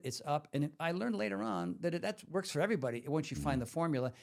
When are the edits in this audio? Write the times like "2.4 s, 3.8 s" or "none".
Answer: none